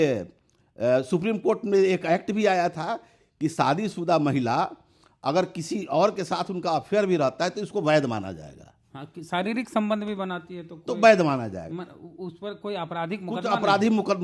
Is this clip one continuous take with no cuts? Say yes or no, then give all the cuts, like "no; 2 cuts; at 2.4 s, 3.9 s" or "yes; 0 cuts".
yes; 0 cuts